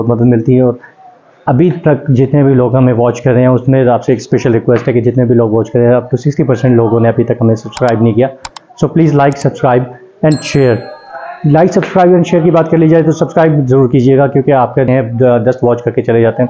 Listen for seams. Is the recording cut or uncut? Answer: cut